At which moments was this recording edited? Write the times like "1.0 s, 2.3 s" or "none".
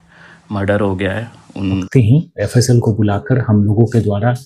1.9 s